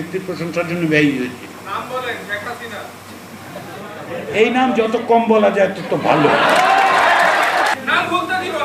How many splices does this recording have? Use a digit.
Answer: 2